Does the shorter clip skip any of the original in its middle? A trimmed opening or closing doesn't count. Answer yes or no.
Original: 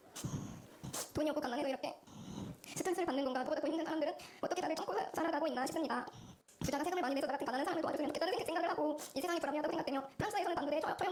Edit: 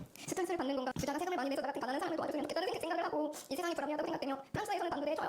yes